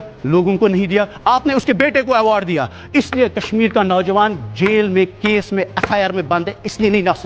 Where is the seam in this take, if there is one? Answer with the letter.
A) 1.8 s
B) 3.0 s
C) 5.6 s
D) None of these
D